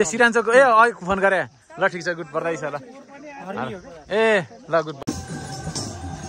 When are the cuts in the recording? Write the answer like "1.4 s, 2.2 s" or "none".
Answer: 5.0 s